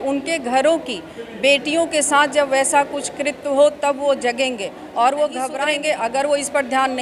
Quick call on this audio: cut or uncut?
cut